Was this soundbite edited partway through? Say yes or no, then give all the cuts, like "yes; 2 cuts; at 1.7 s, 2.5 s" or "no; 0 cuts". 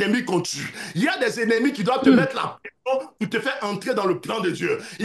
no; 0 cuts